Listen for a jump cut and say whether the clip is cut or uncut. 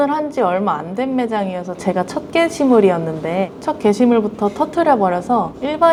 uncut